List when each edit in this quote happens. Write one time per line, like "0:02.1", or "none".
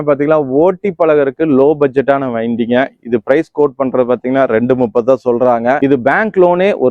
none